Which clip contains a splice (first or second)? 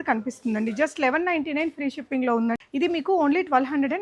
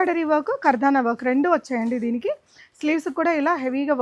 first